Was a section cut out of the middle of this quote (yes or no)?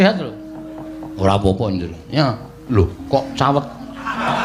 no